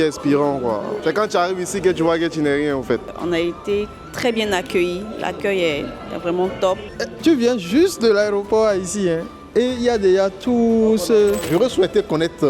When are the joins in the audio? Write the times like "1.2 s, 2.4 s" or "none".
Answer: 1.0 s, 3.1 s, 7.0 s, 11.4 s